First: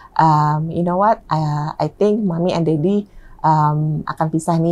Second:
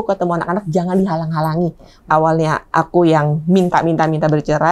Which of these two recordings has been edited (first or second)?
second